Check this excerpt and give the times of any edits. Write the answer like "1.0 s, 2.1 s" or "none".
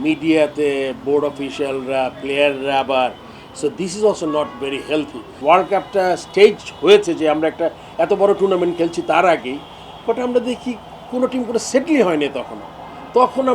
5.4 s